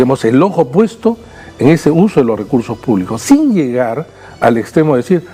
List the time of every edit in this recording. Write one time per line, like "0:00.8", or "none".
none